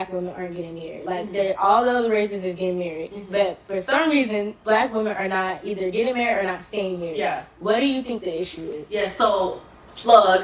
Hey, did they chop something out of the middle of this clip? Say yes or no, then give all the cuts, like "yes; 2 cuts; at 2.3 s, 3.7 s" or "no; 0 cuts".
no; 0 cuts